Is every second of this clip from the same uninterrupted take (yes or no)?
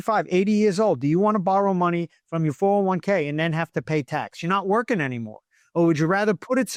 yes